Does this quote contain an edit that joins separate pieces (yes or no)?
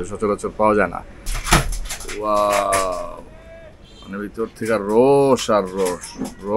yes